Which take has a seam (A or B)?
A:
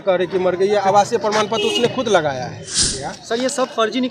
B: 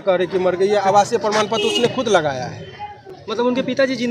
A